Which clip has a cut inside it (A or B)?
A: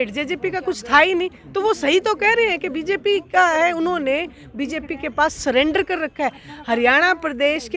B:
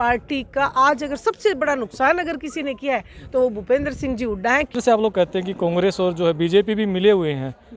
B